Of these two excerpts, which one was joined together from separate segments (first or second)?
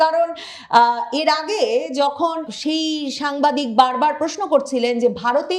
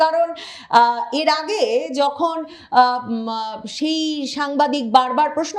first